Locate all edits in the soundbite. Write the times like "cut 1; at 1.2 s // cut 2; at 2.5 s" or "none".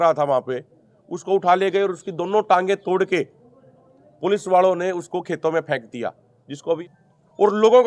cut 1; at 6.8 s